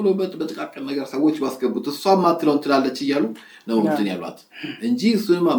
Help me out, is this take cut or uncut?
uncut